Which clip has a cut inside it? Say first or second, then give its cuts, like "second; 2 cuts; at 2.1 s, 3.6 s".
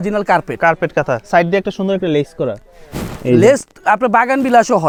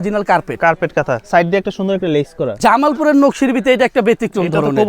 second; 1 cut; at 2.6 s